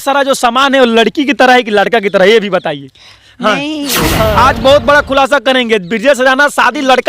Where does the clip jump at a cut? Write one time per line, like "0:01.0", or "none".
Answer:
0:04.3